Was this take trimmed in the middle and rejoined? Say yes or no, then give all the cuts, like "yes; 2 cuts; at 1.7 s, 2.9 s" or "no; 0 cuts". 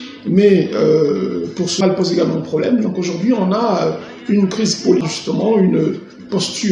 yes; 2 cuts; at 1.8 s, 5.1 s